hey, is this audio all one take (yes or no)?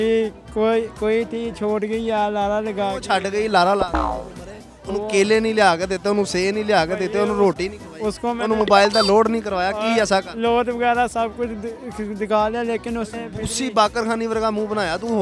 yes